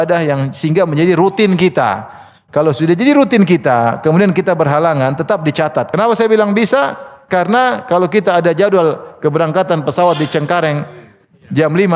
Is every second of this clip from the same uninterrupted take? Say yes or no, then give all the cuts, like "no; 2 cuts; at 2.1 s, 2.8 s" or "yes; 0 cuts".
no; 1 cut; at 5.9 s